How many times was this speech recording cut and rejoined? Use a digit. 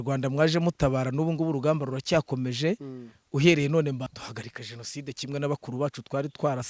1